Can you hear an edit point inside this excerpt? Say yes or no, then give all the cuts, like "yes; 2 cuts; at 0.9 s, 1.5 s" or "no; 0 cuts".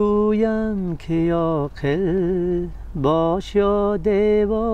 no; 0 cuts